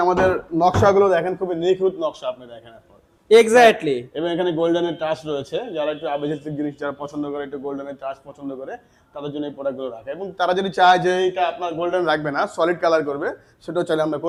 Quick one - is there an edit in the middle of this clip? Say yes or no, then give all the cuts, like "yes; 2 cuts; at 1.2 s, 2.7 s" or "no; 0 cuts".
no; 0 cuts